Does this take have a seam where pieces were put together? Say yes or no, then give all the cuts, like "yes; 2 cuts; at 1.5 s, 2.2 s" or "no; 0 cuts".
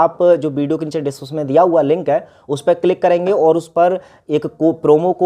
no; 0 cuts